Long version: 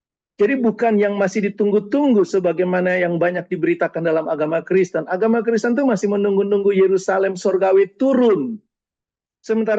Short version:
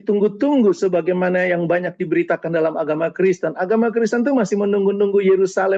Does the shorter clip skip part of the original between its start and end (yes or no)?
no